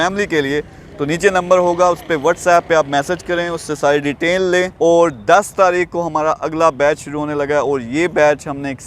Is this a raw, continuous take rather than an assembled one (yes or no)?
no